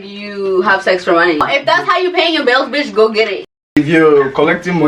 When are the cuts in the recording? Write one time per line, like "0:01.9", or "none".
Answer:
0:01.4
0:03.7